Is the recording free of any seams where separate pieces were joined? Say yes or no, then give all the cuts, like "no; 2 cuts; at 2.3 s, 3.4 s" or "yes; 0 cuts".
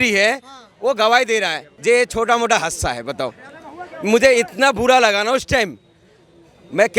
no; 1 cut; at 1.6 s